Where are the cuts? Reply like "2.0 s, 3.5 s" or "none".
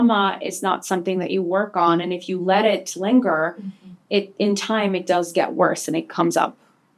none